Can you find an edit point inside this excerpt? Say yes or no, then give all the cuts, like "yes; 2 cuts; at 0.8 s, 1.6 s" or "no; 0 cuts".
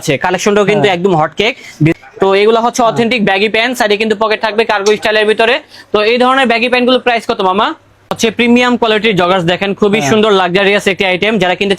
yes; 2 cuts; at 2.0 s, 8.1 s